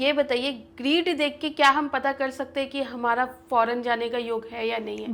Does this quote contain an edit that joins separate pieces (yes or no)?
no